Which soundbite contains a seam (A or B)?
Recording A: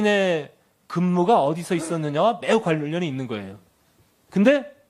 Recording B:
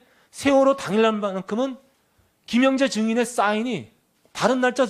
B